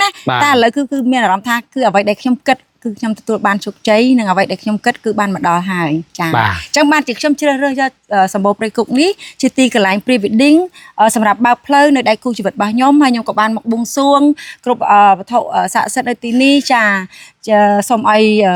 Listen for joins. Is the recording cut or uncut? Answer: uncut